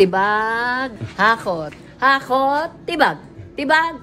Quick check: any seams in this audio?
yes; 1 cut; at 1.0 s

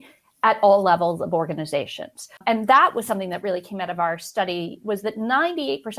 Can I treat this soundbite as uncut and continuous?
no; 1 cut; at 2.4 s

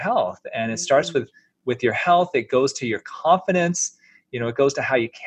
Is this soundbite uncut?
yes; 0 cuts

